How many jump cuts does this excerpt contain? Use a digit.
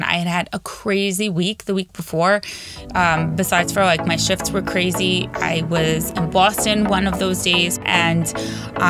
1